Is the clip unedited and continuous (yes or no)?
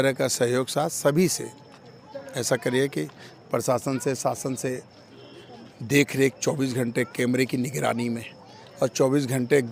yes